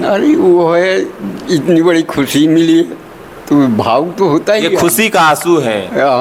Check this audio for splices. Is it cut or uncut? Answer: uncut